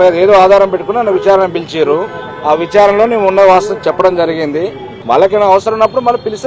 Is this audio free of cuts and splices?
no; 1 cut; at 4.9 s

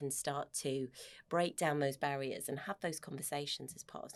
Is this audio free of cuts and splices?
yes; 0 cuts

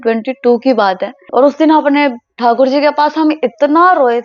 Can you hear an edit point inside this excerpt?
yes; 1 cut; at 1.2 s

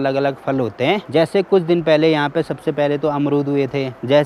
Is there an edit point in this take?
no; 0 cuts

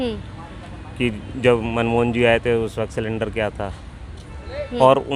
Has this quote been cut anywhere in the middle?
no; 0 cuts

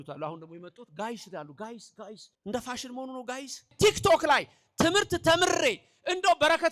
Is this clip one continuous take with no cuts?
no; 2 cuts; at 2.3 s, 3.7 s

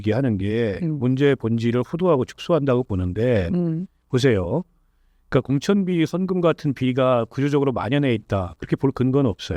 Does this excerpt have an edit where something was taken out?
no; 0 cuts

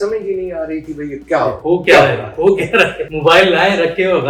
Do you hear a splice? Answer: no; 0 cuts

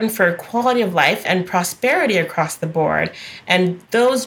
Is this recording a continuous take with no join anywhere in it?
no; 1 cut; at 1.2 s

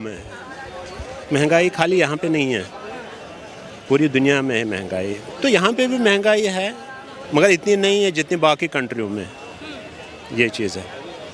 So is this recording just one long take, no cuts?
yes; 0 cuts

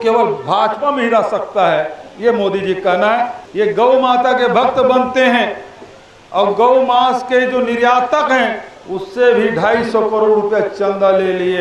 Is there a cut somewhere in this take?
yes; 1 cut; at 3.4 s

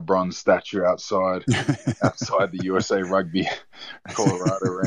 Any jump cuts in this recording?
no; 0 cuts

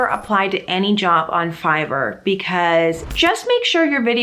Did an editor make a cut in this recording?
yes; 1 cut; at 3.0 s

